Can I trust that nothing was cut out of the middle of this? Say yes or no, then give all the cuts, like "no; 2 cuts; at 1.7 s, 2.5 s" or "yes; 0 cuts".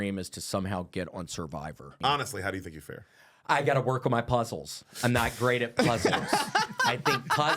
no; 1 cut; at 2.0 s